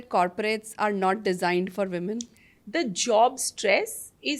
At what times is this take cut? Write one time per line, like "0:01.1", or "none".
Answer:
none